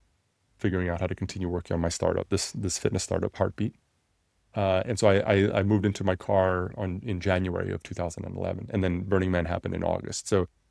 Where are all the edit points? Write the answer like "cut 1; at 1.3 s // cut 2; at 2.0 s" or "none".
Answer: none